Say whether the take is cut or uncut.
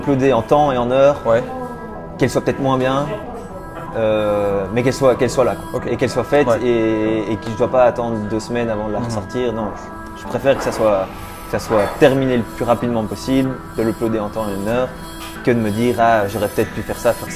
uncut